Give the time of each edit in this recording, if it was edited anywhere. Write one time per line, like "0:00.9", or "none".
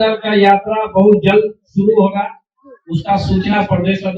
none